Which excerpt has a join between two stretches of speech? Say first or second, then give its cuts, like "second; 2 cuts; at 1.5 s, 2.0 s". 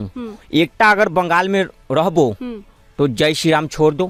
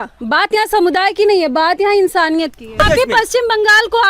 second; 1 cut; at 2.8 s